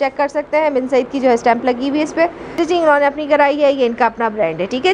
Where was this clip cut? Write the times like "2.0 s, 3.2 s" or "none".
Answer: 2.4 s